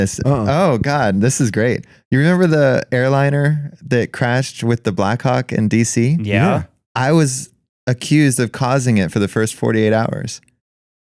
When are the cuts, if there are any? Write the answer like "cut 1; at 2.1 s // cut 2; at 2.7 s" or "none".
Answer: cut 1; at 6.8 s